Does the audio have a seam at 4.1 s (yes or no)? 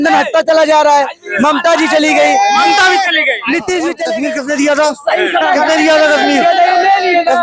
yes